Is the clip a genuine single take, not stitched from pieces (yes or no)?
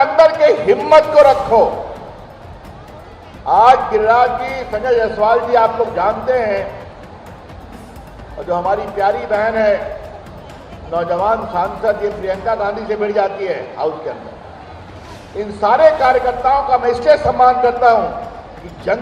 yes